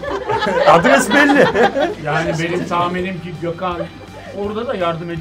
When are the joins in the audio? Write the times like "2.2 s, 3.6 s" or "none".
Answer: none